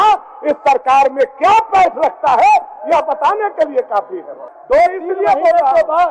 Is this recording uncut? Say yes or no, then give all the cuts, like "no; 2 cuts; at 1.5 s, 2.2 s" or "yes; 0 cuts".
yes; 0 cuts